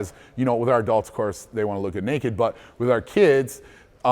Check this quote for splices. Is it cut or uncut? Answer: uncut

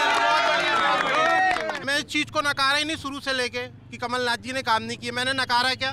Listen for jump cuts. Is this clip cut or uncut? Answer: cut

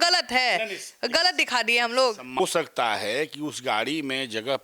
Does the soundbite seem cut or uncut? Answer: cut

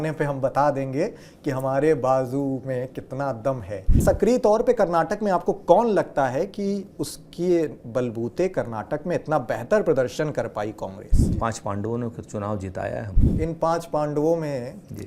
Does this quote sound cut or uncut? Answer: cut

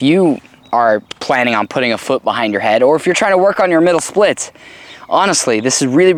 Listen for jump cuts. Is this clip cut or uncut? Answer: uncut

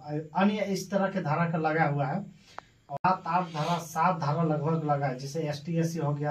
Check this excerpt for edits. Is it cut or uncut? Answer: cut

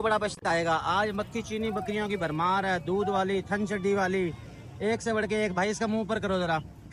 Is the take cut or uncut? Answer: uncut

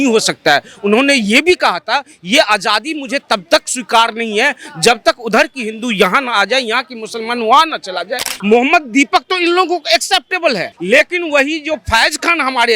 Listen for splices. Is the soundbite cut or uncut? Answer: cut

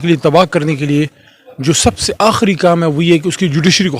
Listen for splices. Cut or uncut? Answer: uncut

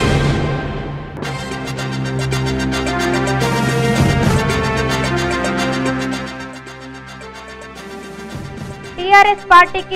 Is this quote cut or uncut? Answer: cut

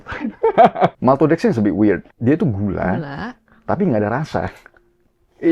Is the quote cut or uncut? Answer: cut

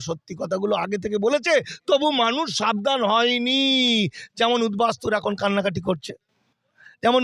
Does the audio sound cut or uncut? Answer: uncut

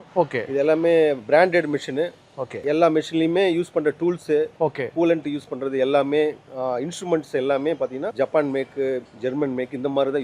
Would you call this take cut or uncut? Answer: cut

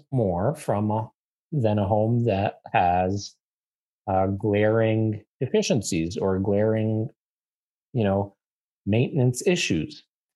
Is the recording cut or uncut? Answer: uncut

